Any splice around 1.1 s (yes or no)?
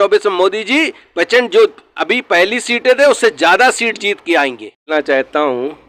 no